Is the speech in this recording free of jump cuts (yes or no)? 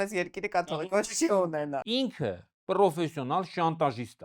no